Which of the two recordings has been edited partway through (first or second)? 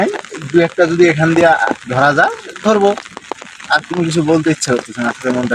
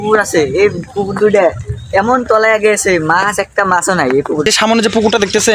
second